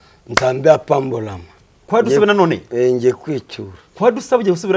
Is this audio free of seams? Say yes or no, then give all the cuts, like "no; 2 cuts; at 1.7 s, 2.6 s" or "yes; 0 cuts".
no; 1 cut; at 1.8 s